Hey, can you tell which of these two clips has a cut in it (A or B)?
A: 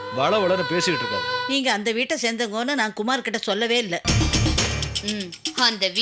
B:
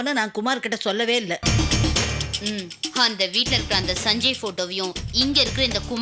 A